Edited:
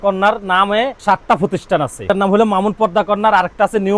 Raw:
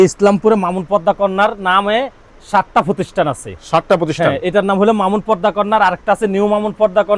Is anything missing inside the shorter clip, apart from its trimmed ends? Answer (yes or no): yes